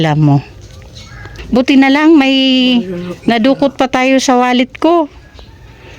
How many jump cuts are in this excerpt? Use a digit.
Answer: 1